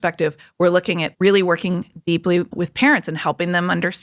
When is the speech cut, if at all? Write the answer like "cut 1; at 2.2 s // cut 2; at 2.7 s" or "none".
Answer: cut 1; at 1.1 s // cut 2; at 2.5 s

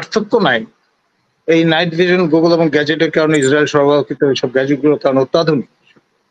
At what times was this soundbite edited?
none

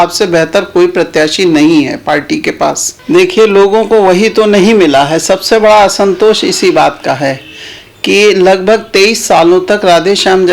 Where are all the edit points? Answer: cut 1; at 2.9 s

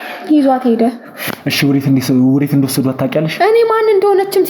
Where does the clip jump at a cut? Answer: none

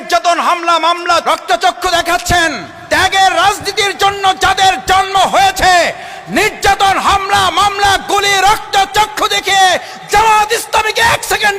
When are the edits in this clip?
cut 1; at 1.2 s // cut 2; at 2.7 s

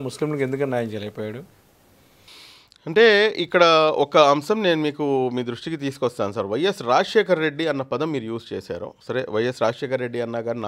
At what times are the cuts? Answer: none

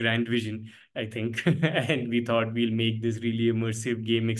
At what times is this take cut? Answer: none

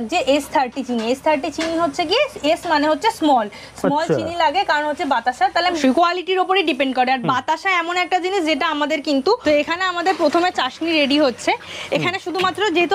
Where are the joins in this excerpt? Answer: cut 1; at 5.8 s // cut 2; at 9.4 s

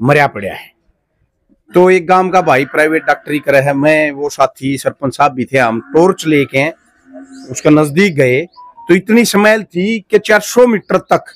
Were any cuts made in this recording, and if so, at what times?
none

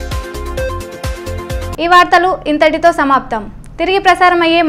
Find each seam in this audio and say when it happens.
none

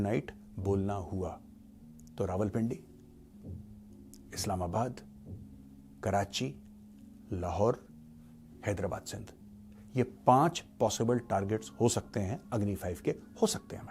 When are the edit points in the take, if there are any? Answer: none

